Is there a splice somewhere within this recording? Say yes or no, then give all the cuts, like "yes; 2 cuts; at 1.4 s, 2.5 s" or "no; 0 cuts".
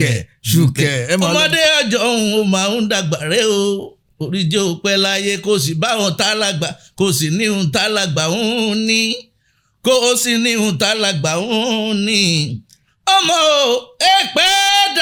no; 0 cuts